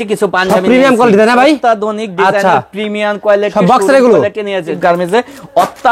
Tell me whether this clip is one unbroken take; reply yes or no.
no